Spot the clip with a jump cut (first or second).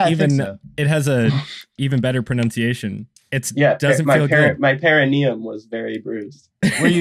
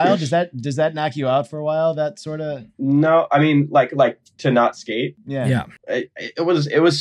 first